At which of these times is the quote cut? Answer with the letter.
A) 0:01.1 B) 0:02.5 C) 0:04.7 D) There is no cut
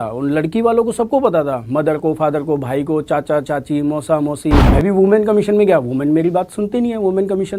C